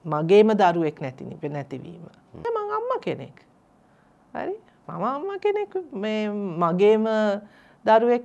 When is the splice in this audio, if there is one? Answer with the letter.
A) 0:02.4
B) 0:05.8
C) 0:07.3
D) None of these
A